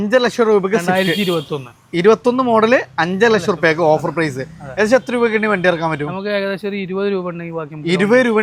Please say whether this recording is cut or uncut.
uncut